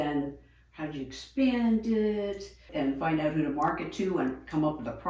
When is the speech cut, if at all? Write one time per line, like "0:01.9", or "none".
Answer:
0:02.7